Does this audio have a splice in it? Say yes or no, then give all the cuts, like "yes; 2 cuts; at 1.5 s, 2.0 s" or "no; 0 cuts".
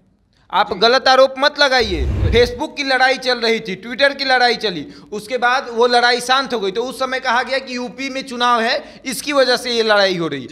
yes; 1 cut; at 2.1 s